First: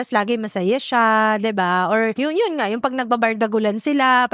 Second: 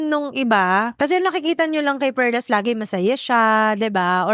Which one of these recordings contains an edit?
second; 1 cut; at 0.9 s

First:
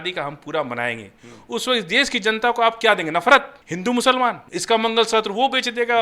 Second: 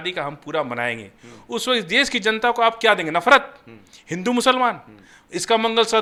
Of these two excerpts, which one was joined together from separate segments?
first; 2 cuts; at 3.6 s, 4.5 s

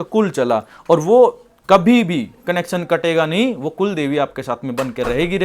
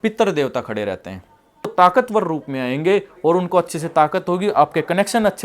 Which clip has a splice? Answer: second; 1 cut; at 1.7 s

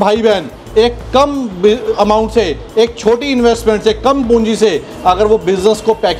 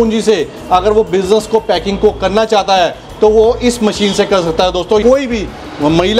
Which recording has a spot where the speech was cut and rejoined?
second; 1 cut; at 5.0 s

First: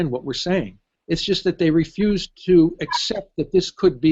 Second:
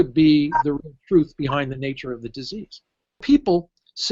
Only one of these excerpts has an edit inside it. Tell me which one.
second; 1 cut; at 3.2 s

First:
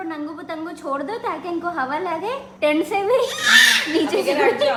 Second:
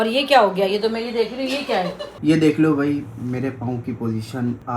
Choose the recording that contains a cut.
second; 1 cut; at 2.1 s

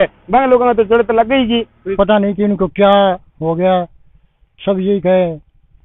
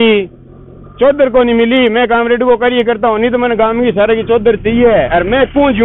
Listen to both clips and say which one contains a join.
first; 1 cut; at 1.8 s

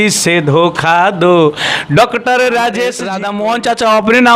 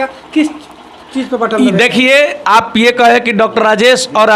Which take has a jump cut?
first; 1 cut; at 3.0 s

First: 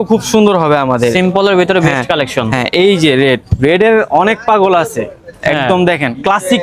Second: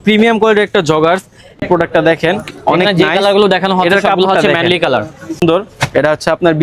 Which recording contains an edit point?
second; 2 cuts; at 1.6 s, 5.4 s

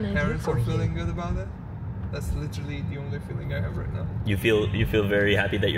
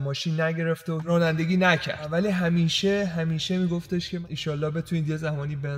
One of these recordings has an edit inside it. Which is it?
second; 3 cuts; at 1.0 s, 2.1 s, 4.1 s

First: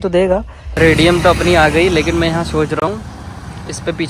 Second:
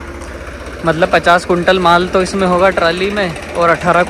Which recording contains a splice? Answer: first; 1 cut; at 0.9 s

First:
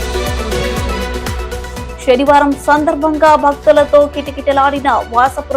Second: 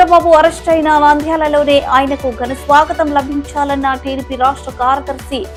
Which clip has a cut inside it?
first; 1 cut; at 1.1 s

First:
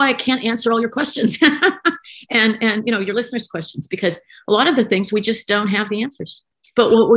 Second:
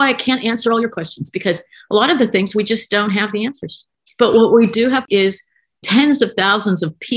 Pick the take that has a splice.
second; 2 cuts; at 0.9 s, 5.0 s

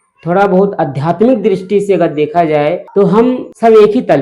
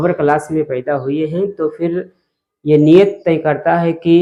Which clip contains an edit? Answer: first; 1 cut; at 3.0 s

